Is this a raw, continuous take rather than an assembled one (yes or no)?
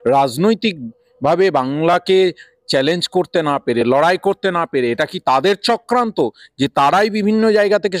yes